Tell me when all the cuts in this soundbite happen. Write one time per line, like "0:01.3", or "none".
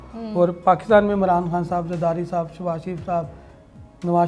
none